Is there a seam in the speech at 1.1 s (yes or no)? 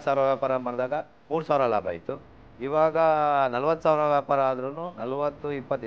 yes